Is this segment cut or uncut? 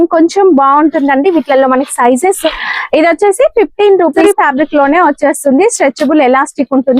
cut